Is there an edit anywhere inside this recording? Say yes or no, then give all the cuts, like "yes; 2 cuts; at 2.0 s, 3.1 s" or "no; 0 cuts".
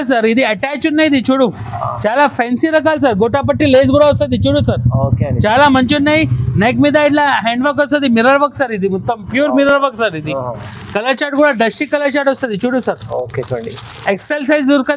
no; 0 cuts